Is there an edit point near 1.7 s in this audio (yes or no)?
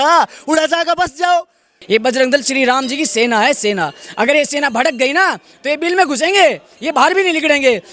yes